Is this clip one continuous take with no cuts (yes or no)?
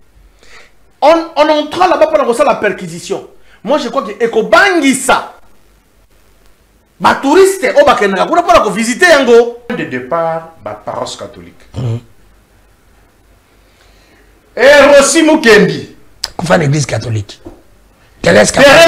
no